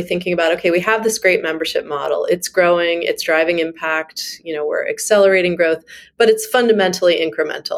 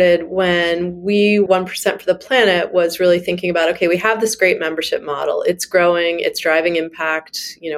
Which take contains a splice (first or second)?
second